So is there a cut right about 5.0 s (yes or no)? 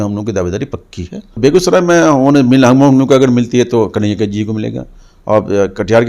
no